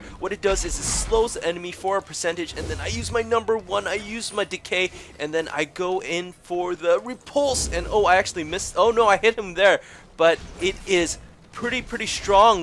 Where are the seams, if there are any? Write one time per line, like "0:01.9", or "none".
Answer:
none